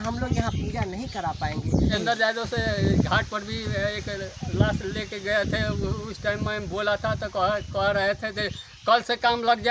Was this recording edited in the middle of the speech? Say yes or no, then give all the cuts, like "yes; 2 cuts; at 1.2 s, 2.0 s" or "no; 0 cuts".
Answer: yes; 1 cut; at 1.9 s